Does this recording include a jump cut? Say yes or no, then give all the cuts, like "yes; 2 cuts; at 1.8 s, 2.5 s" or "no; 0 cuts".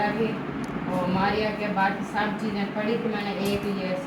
no; 0 cuts